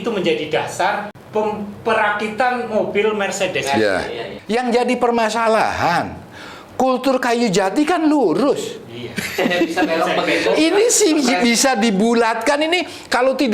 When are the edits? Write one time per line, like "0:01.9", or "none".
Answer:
0:01.2
0:04.3